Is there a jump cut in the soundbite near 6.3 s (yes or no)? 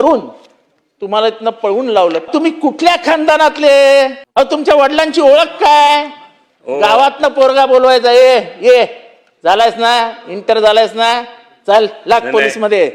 no